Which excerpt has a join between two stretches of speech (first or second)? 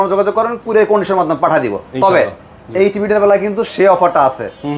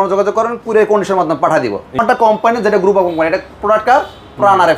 second